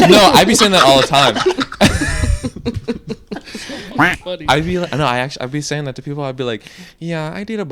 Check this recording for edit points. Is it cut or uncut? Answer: uncut